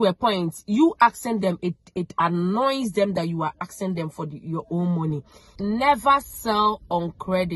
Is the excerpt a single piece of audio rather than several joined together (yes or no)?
no